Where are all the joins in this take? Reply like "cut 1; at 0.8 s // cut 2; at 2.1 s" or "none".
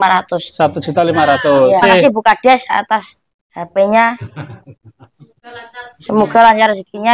cut 1; at 1.8 s